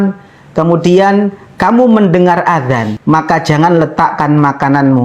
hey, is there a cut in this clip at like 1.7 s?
no; 1 cut; at 2.9 s

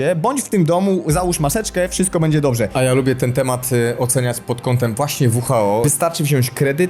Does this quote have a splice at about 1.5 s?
no; 2 cuts; at 2.7 s, 5.9 s

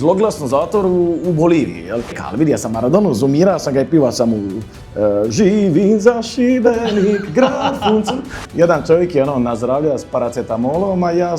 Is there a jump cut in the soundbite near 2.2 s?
yes; 2 cuts; at 2.2 s, 8.4 s

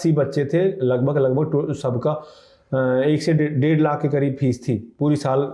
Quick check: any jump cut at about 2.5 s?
no; 0 cuts

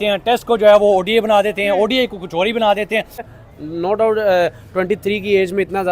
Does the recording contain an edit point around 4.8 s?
no; 1 cut; at 3.2 s

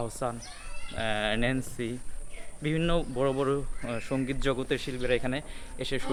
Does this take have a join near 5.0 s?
no; 0 cuts

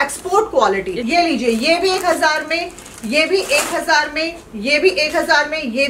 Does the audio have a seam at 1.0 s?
yes; 1 cut; at 1.0 s

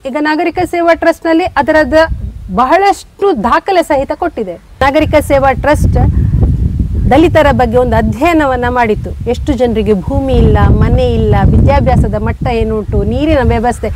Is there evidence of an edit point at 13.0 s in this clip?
no; 1 cut; at 4.9 s

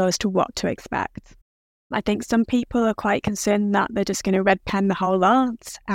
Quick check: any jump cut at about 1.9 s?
yes; 1 cut; at 1.9 s

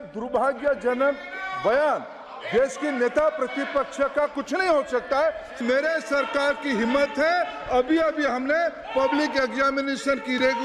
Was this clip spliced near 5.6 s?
yes; 1 cut; at 5.6 s

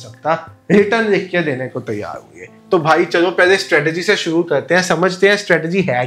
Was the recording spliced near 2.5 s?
no; 0 cuts

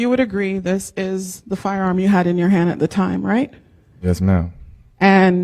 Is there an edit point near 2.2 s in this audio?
no; 0 cuts

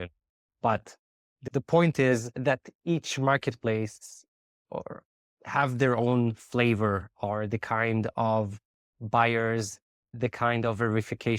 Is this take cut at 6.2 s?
no; 0 cuts

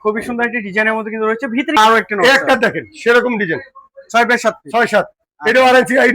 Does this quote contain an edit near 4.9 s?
no; 1 cut; at 1.8 s

